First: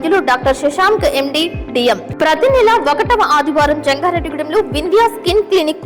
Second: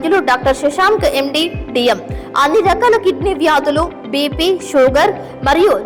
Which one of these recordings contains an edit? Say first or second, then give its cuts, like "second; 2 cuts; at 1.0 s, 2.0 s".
first; 1 cut; at 2.1 s